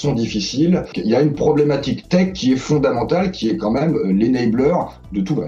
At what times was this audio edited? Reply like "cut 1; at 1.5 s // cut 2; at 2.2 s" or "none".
cut 1; at 0.9 s